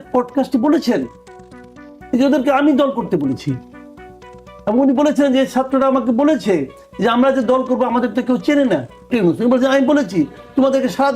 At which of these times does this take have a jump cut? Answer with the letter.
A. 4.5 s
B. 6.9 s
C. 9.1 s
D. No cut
C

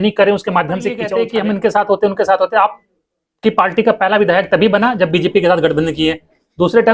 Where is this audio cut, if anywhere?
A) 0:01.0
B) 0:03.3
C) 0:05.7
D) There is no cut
A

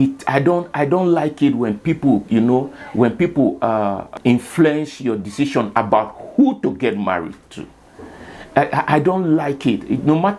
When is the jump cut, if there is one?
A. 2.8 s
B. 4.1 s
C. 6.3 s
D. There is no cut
B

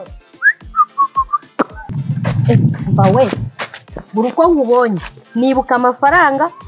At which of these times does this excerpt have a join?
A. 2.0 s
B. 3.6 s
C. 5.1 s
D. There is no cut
A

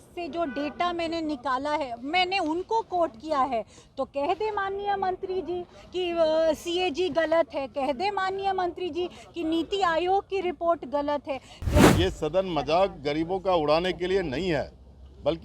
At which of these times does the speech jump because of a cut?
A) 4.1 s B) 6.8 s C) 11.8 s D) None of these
C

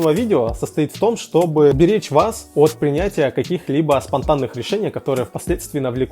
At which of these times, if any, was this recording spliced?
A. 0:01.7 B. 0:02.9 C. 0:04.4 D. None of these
A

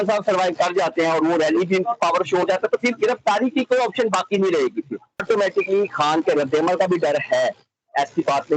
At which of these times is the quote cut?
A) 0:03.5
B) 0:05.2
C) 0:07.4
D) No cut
B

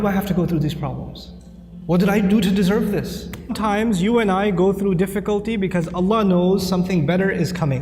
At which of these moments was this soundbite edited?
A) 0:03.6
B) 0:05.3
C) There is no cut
A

